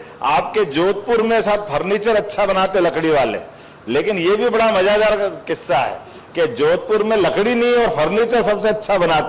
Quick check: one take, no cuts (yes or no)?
yes